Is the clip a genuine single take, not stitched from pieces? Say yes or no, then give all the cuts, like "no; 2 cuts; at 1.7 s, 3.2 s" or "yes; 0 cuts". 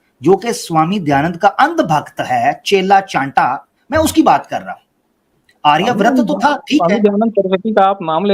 yes; 0 cuts